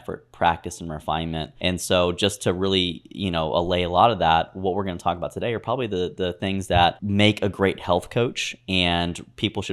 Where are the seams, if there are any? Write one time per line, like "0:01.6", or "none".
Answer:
0:01.5
0:07.0